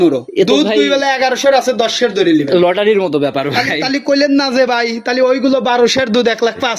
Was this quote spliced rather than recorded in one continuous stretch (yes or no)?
no